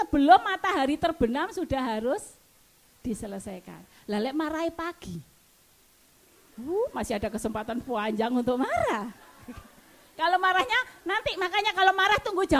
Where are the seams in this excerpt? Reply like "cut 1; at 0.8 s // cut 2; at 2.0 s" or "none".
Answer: none